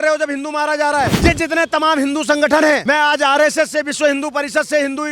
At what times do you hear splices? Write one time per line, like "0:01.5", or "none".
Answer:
0:01.1
0:02.8